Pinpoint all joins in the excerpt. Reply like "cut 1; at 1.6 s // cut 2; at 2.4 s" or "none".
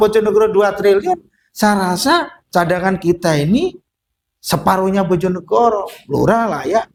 none